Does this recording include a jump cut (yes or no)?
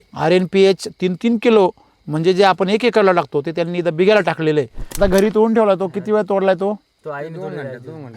yes